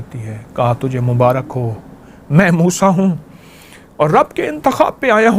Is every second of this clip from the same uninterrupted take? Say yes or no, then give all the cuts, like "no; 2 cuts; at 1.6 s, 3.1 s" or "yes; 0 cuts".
yes; 0 cuts